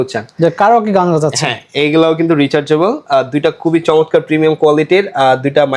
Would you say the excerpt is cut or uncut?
uncut